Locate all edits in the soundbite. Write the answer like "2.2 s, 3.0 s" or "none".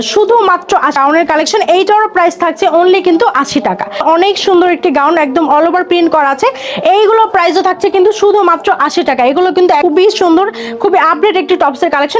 1.0 s, 4.0 s, 9.8 s